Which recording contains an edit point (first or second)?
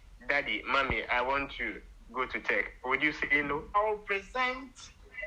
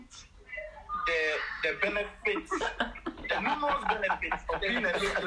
first